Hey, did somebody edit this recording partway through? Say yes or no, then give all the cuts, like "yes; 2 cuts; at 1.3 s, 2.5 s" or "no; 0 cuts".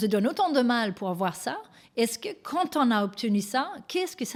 no; 0 cuts